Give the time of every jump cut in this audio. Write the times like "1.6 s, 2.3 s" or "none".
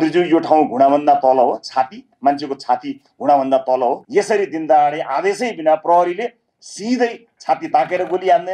4.0 s